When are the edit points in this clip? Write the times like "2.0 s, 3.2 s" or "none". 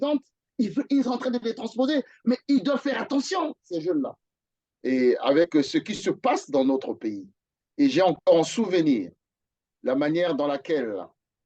4.3 s